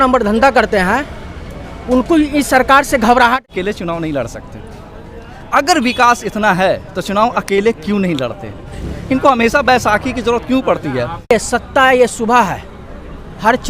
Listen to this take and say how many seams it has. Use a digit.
2